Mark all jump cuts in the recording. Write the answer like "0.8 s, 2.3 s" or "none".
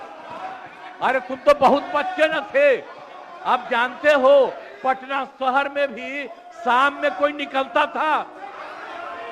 none

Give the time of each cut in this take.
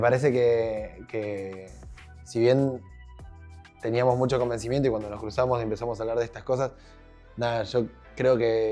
none

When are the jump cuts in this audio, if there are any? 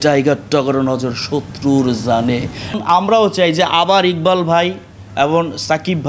2.8 s

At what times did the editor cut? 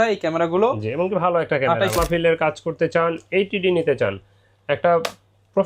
1.9 s

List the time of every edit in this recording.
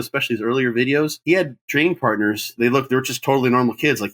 1.2 s, 2.5 s

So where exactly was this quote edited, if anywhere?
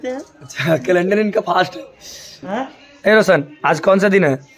2.5 s

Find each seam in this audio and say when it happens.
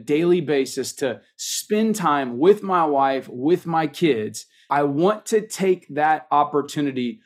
4.7 s

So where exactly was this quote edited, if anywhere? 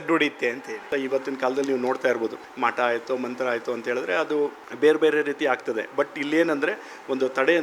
0.9 s, 2.4 s, 4.6 s

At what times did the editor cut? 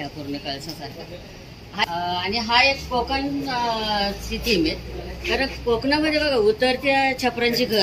1.8 s

